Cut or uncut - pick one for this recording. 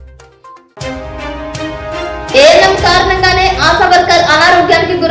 cut